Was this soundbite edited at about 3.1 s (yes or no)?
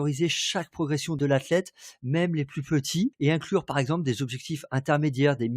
yes